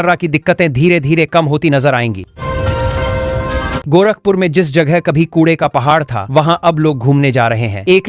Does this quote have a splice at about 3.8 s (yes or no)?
yes